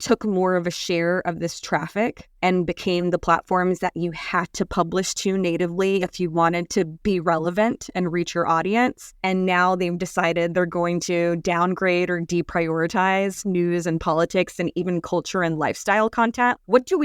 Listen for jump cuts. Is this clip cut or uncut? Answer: cut